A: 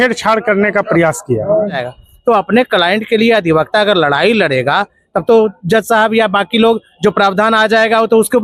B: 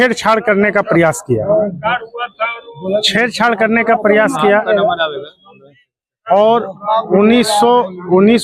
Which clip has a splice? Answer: A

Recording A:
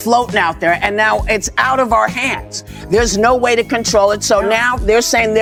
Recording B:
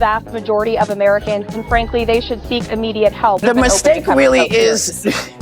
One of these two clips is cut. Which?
B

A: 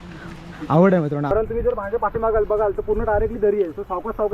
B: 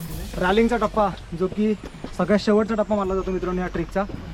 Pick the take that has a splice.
A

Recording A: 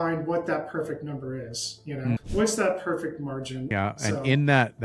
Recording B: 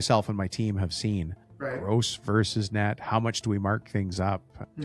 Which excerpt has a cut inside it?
A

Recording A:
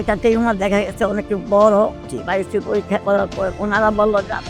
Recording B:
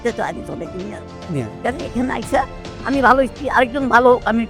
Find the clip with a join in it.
A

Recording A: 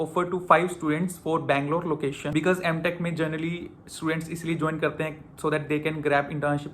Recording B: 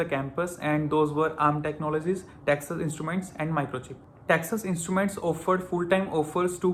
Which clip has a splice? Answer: A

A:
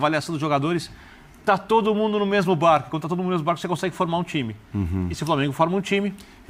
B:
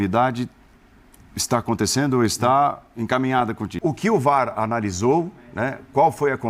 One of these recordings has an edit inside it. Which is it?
B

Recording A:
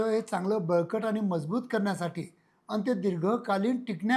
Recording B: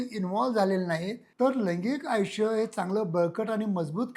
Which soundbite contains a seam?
B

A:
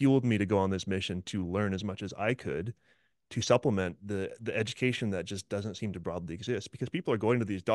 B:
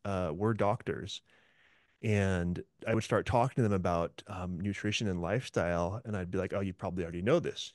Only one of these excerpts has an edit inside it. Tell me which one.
B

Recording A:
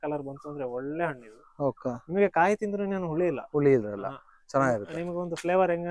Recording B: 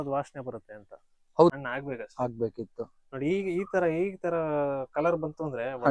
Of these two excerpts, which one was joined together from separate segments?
B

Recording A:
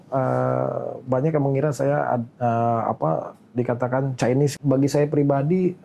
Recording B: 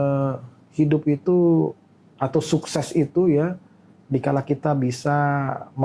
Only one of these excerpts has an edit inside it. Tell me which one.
A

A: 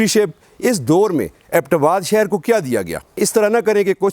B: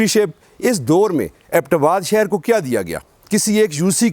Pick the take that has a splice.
A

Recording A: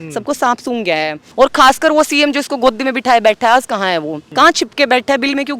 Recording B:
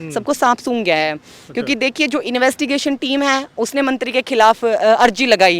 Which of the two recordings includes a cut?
A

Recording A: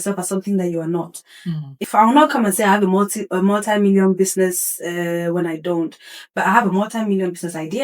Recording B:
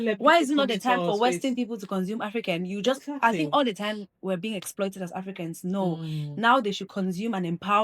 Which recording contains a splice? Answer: A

